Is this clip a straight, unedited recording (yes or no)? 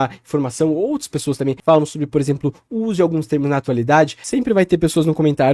no